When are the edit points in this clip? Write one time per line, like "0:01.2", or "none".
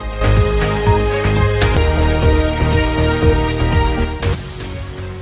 0:01.7